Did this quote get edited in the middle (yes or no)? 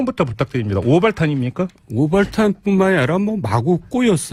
no